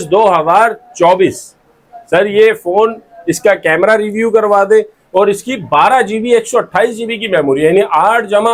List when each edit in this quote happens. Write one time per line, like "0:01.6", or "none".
none